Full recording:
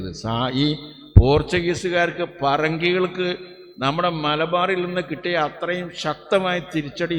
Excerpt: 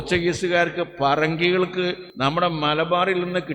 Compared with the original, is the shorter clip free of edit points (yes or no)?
no